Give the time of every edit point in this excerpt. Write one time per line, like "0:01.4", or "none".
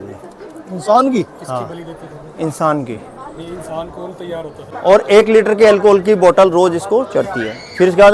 0:04.7